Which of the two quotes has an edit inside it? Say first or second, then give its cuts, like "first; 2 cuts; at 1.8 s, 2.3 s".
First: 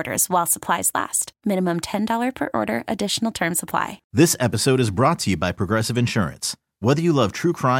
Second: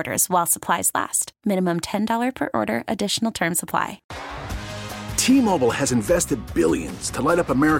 first; 1 cut; at 4.0 s